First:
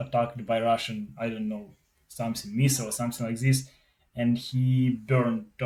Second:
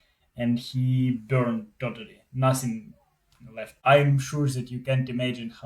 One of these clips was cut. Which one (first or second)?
second